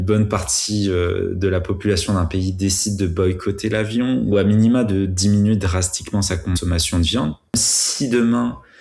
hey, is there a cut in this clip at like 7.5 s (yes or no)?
yes